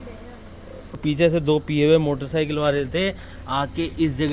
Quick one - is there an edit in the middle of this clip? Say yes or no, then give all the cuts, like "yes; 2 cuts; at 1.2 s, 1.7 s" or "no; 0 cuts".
yes; 1 cut; at 1.0 s